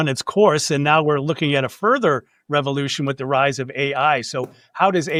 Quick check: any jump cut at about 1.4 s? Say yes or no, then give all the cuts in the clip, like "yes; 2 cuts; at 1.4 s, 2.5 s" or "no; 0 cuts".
no; 0 cuts